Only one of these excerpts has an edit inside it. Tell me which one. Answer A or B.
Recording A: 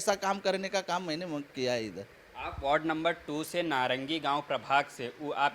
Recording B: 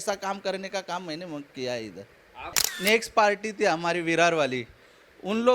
B